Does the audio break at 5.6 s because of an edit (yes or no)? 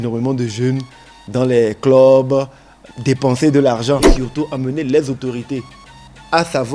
no